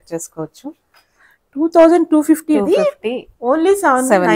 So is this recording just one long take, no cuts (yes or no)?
yes